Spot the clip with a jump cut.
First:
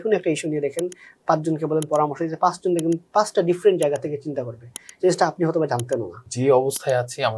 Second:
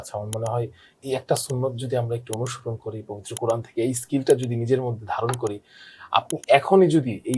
first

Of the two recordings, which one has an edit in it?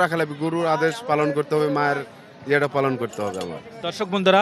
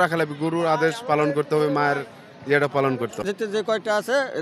second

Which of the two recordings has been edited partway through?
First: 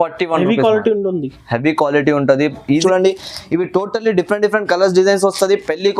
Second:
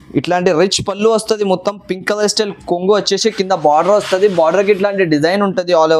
first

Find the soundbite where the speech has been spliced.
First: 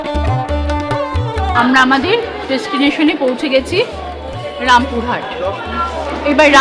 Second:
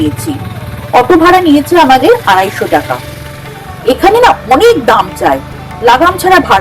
first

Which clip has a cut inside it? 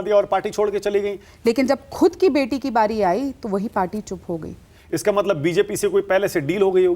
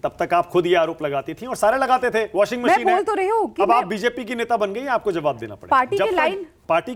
first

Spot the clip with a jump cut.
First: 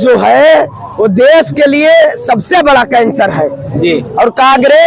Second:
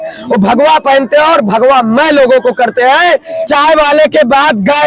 second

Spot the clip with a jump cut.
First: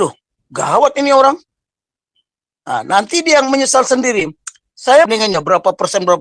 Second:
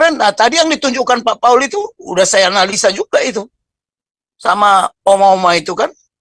first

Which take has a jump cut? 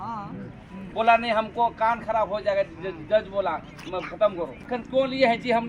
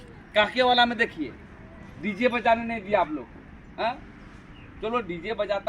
first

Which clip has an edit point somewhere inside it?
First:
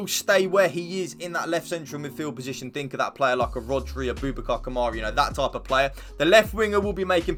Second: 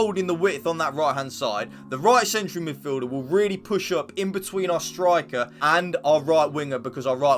second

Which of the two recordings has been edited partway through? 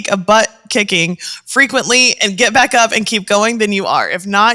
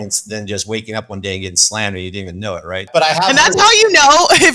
second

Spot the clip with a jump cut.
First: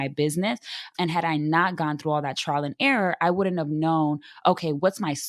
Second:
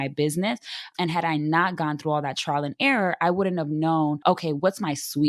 second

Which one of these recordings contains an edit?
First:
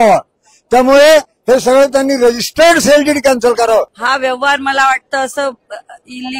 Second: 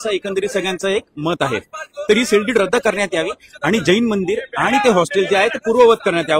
first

